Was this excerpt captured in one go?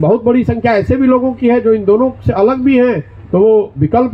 yes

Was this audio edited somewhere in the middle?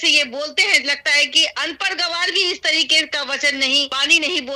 no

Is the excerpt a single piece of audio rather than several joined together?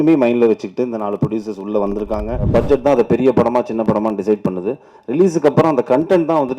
no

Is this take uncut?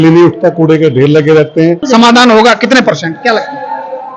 no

